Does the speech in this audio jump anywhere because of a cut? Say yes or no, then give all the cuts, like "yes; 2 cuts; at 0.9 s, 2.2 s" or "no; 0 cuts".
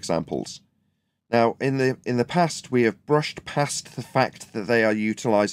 no; 0 cuts